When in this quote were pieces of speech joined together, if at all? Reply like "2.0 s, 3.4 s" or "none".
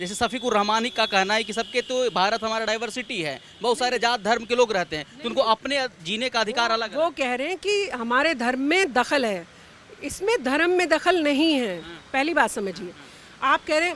none